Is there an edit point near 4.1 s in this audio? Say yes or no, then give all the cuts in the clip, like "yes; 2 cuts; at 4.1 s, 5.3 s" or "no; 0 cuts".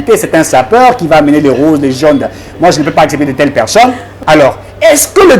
yes; 1 cut; at 4.1 s